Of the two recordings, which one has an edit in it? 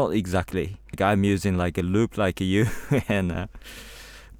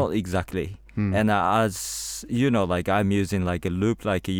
first; 1 cut; at 0.9 s

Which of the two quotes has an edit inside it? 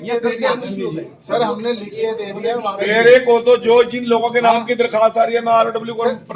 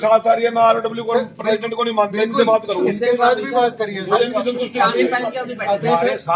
first; 1 cut; at 2.8 s

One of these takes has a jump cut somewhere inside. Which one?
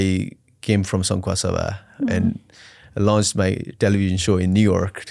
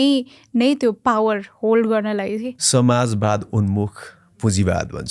second; 1 cut; at 2.5 s

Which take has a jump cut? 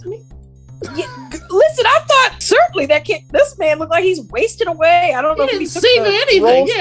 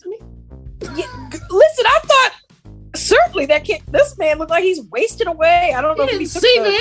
first; 1 cut; at 2.4 s

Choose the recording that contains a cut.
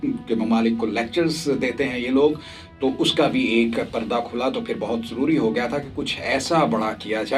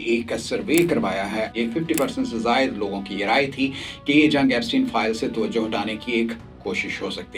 second; 1 cut; at 1.5 s

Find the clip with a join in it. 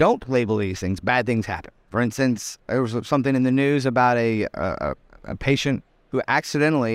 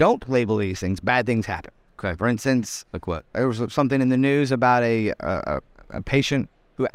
first; 2 cuts; at 1.8 s, 2.6 s

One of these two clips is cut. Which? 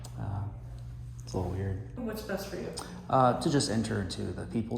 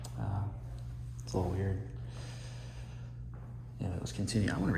first; 1 cut; at 2.0 s

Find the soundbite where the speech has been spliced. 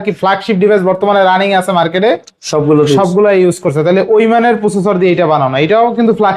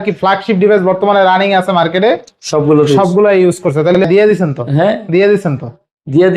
second; 1 cut; at 4.0 s

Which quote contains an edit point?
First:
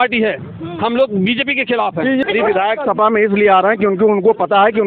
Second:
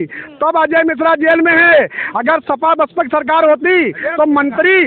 first; 1 cut; at 2.2 s

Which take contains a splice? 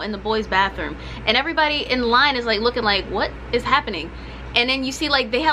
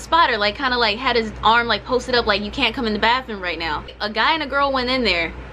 second; 1 cut; at 4.0 s

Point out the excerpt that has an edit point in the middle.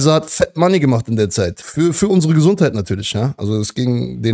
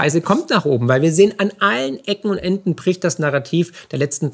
first; 1 cut; at 1.6 s

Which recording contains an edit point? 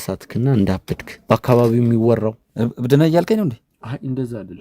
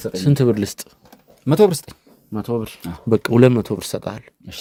first; 2 cuts; at 1.2 s, 2.4 s

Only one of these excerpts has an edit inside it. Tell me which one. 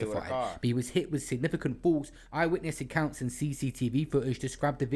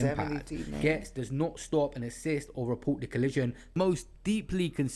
second; 1 cut; at 3.8 s

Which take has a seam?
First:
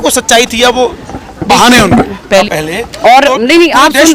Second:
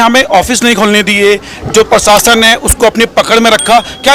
first; 1 cut; at 2.5 s

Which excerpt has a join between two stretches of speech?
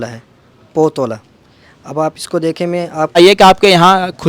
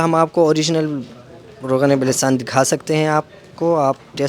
first; 1 cut; at 3.2 s

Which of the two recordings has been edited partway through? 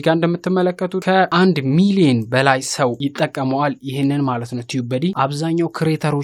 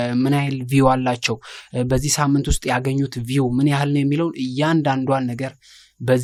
first; 3 cuts; at 1.1 s, 3.0 s, 5.1 s

